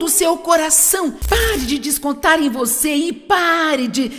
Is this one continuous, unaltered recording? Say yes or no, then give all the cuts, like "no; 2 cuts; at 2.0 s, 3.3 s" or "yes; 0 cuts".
no; 1 cut; at 1.2 s